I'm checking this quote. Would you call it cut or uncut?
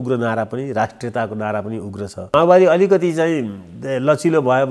cut